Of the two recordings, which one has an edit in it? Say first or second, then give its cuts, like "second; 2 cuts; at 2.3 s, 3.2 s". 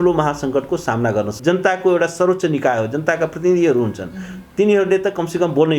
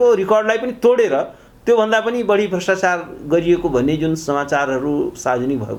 first; 1 cut; at 1.3 s